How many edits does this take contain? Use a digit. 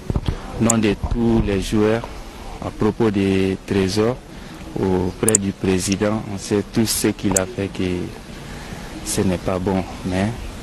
0